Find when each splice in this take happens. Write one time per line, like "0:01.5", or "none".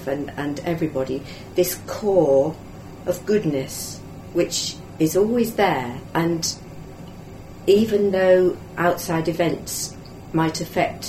0:06.0
0:08.7